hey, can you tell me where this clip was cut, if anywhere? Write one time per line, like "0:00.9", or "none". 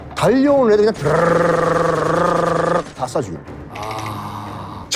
none